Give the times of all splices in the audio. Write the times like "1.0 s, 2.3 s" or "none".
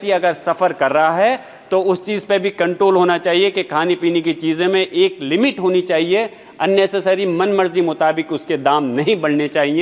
none

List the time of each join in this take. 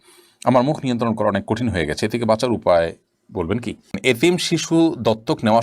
4.0 s

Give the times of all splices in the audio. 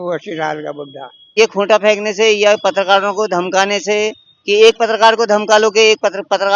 1.3 s

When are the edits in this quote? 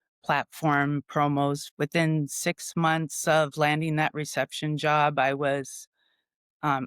1.6 s

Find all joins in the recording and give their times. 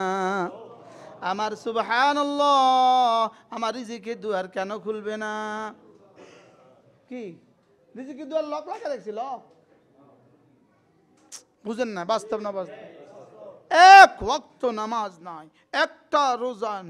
none

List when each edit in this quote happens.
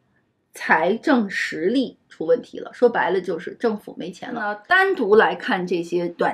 4.6 s

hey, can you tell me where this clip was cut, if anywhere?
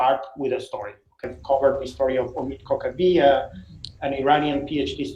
1.2 s

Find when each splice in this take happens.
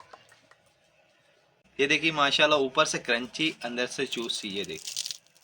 1.6 s

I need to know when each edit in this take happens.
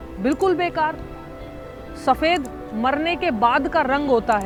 none

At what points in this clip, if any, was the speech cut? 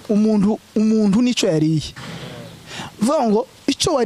none

